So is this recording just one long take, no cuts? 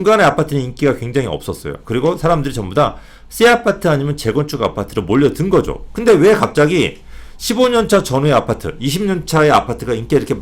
yes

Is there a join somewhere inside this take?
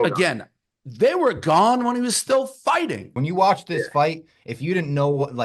yes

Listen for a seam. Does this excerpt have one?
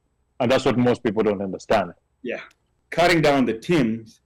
yes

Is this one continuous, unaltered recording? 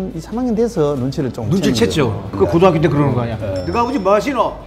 no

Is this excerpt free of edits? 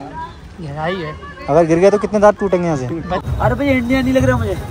no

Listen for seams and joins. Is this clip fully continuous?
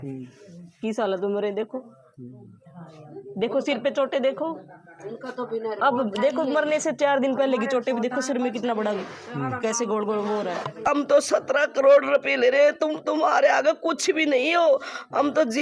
no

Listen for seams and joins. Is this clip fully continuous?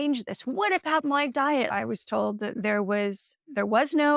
no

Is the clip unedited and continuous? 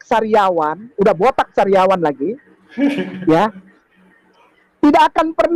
yes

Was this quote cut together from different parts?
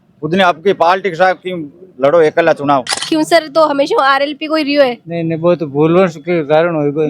yes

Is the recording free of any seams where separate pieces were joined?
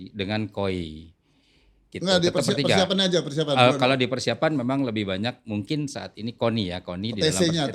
yes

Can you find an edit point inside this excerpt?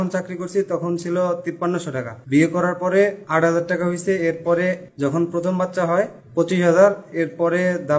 yes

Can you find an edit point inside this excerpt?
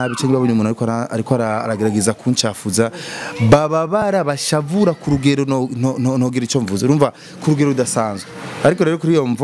no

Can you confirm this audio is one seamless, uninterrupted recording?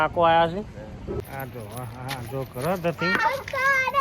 no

